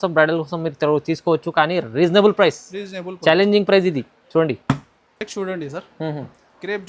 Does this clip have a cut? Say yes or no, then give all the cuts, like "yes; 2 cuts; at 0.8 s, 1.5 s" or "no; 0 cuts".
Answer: no; 0 cuts